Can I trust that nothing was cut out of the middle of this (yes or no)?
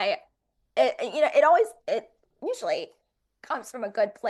yes